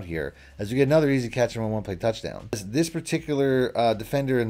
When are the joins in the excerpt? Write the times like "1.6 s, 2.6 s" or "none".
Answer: 2.6 s